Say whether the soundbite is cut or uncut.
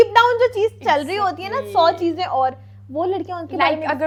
uncut